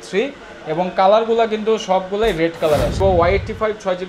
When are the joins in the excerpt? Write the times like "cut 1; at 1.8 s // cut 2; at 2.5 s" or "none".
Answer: cut 1; at 3.0 s